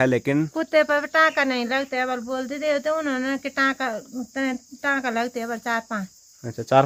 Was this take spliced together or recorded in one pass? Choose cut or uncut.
uncut